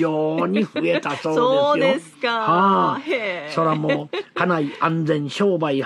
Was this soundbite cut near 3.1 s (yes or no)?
yes